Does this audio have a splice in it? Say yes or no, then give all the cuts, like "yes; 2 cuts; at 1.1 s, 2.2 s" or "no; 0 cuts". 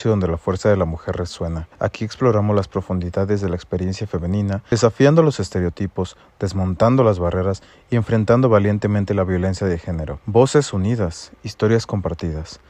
yes; 3 cuts; at 1.6 s, 4.7 s, 9.9 s